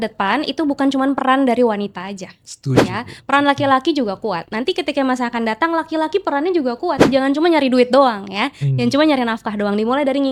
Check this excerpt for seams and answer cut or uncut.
uncut